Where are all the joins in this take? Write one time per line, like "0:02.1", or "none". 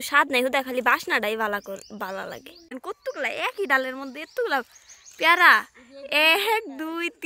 0:02.8